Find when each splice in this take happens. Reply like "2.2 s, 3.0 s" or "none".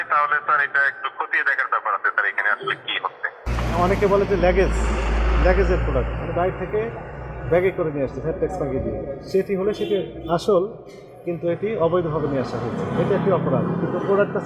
3.5 s